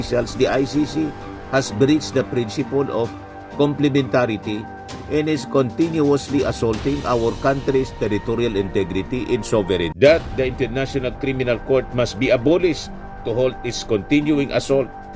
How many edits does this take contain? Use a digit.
1